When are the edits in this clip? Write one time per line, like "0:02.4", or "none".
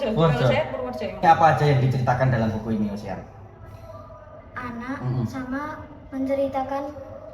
0:01.2